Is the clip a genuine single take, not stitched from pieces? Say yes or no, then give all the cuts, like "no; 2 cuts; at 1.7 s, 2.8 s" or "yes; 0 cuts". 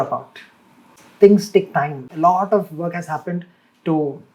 no; 1 cut; at 1.0 s